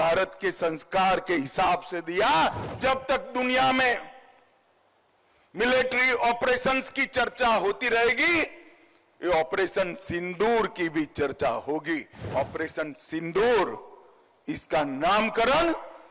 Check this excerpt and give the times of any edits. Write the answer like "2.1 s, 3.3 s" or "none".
2.7 s, 12.3 s

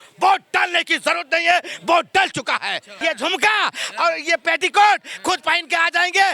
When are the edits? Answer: 2.9 s

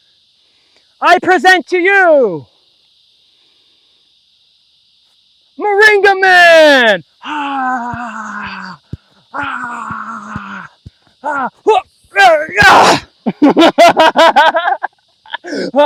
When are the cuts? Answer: none

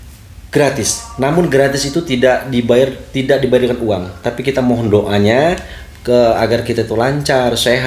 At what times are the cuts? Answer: none

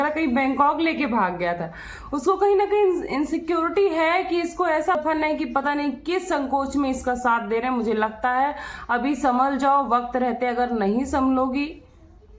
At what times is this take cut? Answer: 5.0 s

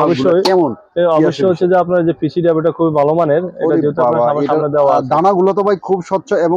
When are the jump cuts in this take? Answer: none

